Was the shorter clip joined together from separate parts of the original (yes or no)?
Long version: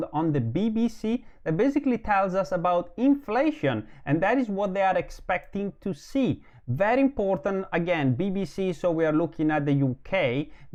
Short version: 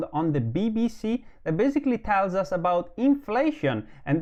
no